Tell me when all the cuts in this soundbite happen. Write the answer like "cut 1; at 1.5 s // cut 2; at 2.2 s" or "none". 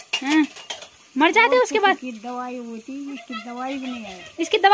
none